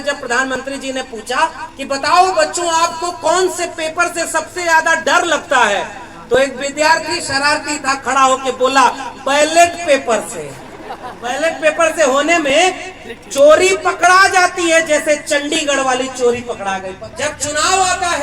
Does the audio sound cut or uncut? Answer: cut